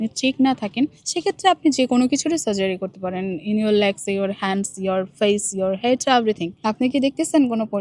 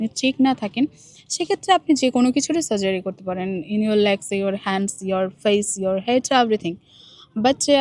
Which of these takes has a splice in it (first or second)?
first